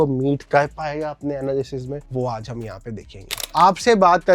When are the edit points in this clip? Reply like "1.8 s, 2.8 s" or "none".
3.4 s